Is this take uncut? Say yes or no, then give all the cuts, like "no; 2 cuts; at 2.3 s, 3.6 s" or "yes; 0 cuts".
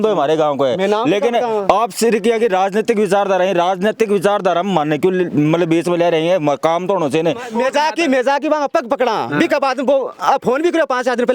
no; 1 cut; at 7.5 s